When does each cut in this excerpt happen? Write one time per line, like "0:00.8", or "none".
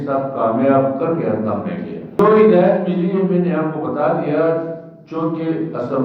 none